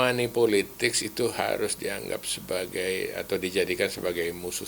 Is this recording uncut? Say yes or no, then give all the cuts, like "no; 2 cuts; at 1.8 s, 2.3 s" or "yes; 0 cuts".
yes; 0 cuts